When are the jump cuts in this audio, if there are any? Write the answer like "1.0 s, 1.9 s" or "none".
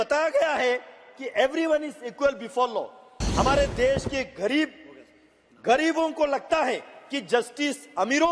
3.1 s